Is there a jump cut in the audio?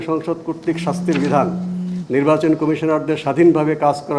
no; 0 cuts

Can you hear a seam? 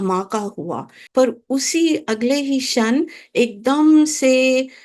yes; 1 cut; at 1.0 s

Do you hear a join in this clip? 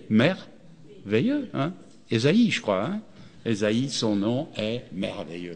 no; 0 cuts

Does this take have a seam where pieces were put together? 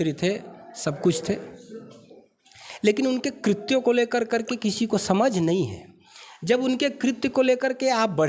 no; 0 cuts

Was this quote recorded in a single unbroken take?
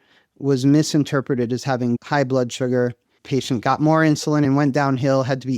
no; 3 cuts; at 2.0 s, 3.2 s, 4.5 s

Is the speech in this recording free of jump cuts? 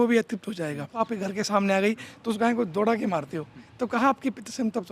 no; 1 cut; at 1.0 s

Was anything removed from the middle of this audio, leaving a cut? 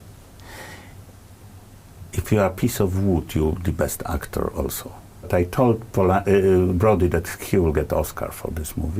yes; 1 cut; at 5.2 s

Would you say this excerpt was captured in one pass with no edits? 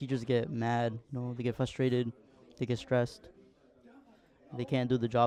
yes; 0 cuts

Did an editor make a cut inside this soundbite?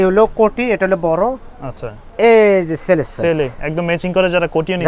yes; 1 cut; at 2.1 s

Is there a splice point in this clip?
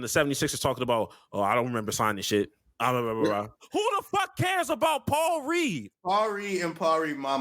yes; 3 cuts; at 2.6 s, 3.6 s, 5.9 s

